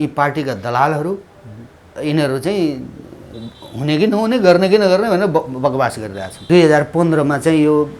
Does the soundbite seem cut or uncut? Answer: cut